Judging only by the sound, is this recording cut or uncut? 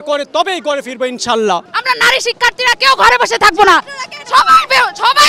cut